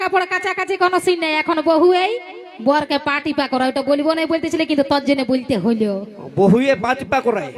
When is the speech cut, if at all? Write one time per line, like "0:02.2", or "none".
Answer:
none

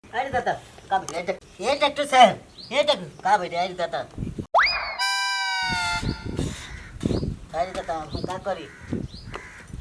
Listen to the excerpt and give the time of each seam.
0:01.4

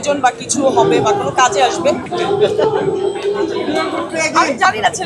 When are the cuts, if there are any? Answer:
0:02.1
0:04.0

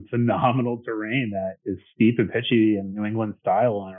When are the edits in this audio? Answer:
none

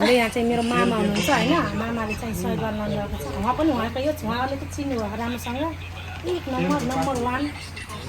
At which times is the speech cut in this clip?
none

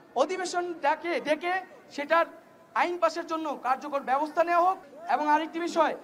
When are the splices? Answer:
0:04.9

